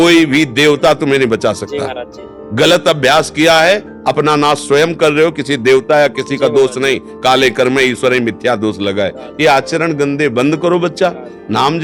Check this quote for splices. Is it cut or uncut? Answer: uncut